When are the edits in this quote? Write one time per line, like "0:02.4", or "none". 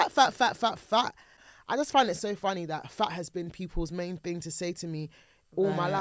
0:01.4